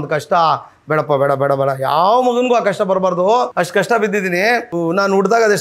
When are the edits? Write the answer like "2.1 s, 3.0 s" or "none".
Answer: 3.5 s, 4.7 s